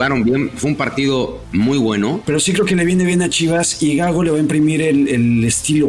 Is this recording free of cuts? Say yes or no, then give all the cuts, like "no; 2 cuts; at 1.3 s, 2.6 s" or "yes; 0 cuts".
no; 2 cuts; at 1.4 s, 2.2 s